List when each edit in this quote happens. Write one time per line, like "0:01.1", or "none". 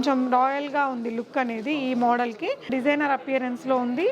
0:02.7